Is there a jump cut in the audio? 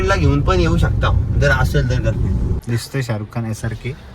yes; 1 cut; at 2.6 s

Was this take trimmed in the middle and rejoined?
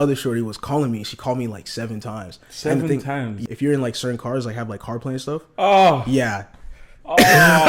yes; 1 cut; at 3.4 s

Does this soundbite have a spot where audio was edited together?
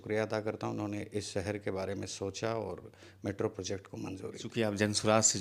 yes; 1 cut; at 4.5 s

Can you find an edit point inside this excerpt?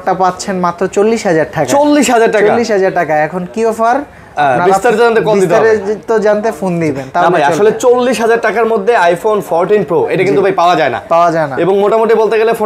no; 0 cuts

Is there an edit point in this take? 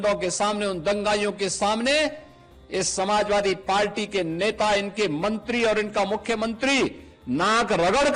no; 0 cuts

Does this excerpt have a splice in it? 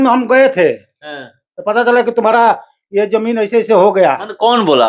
no; 0 cuts

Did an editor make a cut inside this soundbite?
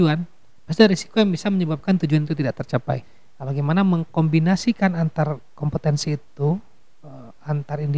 yes; 1 cut; at 3.0 s

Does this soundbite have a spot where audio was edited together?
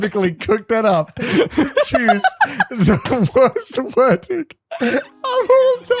no; 0 cuts

